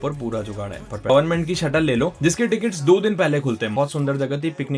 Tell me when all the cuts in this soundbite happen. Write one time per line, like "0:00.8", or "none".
0:01.1
0:03.7